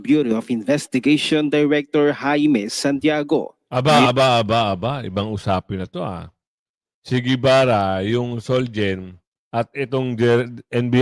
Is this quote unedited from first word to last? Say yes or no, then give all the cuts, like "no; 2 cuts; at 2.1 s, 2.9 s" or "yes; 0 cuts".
yes; 0 cuts